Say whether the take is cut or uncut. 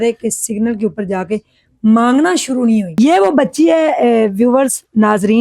cut